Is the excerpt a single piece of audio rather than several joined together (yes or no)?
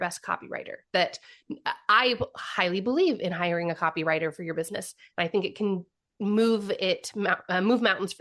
yes